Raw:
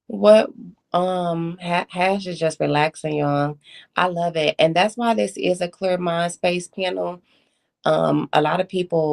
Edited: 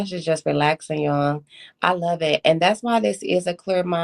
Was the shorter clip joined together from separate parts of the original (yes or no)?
no